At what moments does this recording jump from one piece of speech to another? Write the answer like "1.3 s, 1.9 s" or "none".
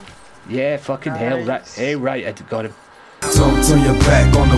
3.1 s